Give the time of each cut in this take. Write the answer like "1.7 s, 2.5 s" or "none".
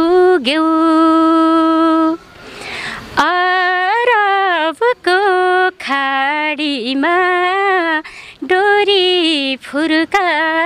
none